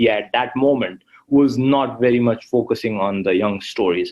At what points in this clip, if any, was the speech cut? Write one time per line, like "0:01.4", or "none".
none